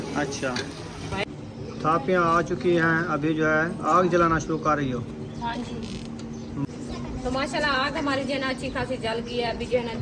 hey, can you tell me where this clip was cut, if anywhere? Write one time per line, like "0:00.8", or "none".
0:01.2
0:06.6